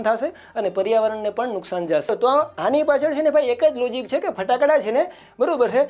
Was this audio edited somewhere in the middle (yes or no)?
yes